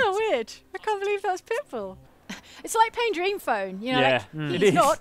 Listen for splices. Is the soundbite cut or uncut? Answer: cut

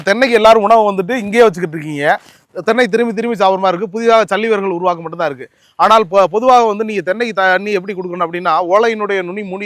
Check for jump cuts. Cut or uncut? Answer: uncut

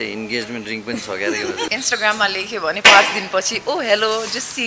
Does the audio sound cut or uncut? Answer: cut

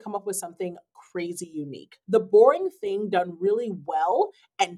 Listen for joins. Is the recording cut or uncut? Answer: cut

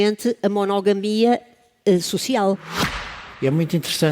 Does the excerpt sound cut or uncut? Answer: cut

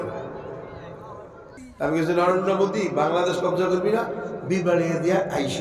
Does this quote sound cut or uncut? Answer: cut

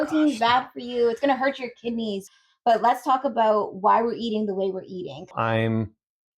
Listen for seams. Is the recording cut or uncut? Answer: cut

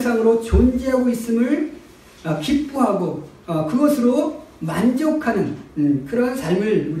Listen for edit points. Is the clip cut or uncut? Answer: uncut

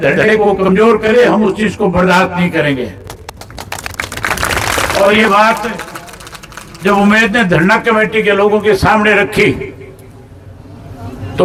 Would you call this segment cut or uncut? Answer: uncut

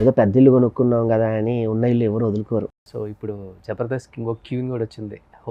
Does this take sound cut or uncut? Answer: cut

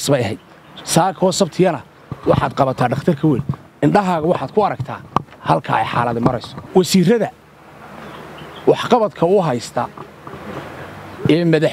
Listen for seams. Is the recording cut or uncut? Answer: cut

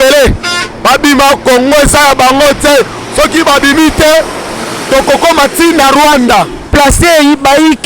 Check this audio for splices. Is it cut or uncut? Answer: cut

